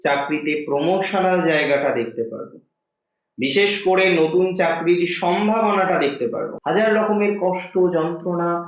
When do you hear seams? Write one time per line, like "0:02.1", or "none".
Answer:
0:06.5